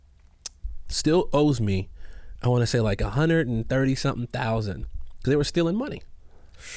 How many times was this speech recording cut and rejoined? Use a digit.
0